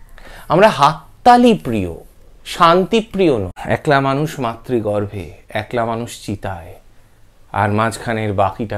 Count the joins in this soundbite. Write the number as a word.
one